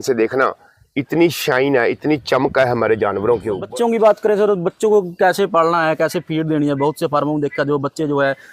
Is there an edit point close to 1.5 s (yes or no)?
no